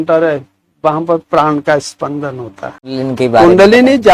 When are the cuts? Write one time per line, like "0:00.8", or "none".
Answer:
0:02.9